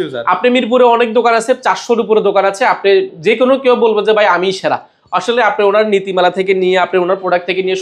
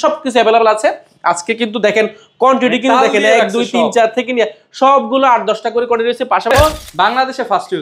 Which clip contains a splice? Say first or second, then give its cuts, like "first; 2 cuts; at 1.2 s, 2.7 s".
second; 1 cut; at 6.5 s